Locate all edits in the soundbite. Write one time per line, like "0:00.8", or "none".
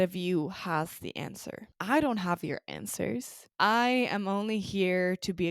0:01.7
0:03.4